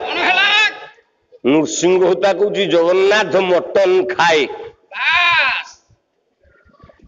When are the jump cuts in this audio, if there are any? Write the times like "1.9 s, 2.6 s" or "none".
none